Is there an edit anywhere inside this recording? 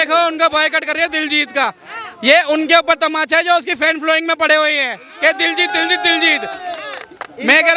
no; 0 cuts

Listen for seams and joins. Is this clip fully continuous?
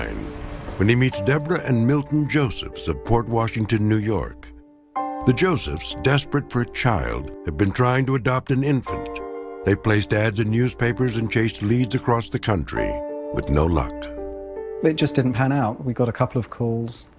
no; 1 cut; at 7.2 s

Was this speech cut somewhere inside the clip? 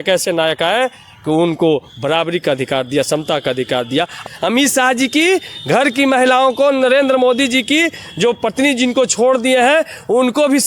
yes; 1 cut; at 4.2 s

